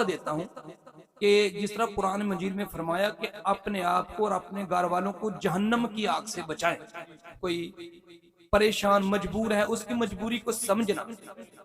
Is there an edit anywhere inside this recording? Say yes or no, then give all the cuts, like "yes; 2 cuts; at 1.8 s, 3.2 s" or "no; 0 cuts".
yes; 1 cut; at 7.4 s